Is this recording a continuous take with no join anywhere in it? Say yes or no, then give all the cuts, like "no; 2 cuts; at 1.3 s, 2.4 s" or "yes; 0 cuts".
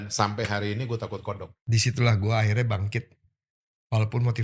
no; 1 cut; at 1.5 s